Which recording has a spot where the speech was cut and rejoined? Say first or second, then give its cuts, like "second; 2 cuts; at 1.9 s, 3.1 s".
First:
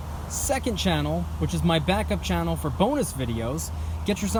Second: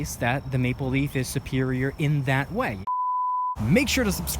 second; 1 cut; at 2.8 s